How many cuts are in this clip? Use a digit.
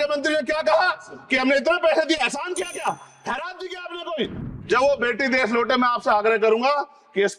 1